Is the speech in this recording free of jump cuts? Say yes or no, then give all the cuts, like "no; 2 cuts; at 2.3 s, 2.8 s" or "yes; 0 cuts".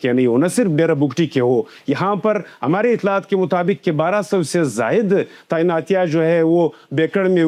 yes; 0 cuts